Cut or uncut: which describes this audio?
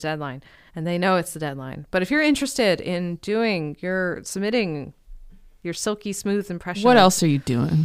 uncut